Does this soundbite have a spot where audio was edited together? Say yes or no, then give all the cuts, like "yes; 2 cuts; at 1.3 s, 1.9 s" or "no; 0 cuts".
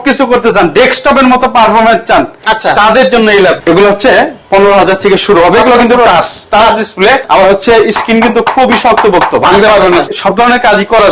yes; 3 cuts; at 3.6 s, 7.2 s, 10.1 s